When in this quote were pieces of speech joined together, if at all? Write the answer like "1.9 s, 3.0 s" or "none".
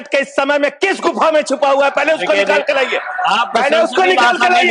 none